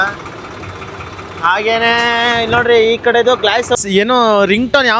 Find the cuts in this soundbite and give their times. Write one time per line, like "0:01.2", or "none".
0:03.8